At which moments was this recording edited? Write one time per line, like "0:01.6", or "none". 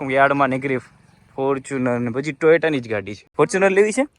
0:03.2